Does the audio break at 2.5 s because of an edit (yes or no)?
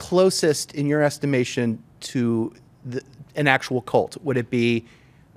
no